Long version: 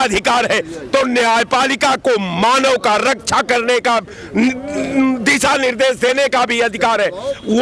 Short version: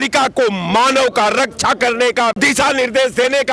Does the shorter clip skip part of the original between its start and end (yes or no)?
yes